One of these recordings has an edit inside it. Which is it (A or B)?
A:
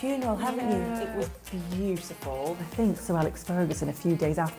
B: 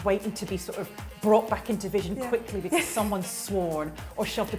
A